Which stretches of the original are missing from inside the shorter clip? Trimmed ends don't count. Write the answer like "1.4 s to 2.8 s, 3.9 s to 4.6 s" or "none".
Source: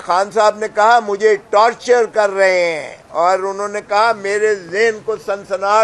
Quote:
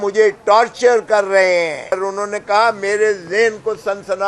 3.0 s to 3.4 s